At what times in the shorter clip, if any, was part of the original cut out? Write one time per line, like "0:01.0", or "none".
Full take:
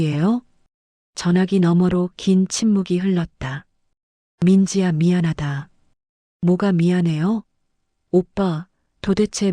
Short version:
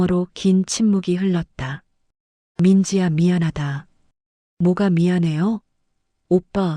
none